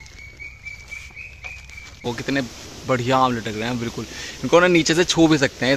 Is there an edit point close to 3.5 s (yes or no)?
no